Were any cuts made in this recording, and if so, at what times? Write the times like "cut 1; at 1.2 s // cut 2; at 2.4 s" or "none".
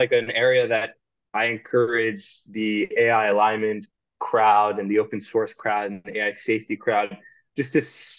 none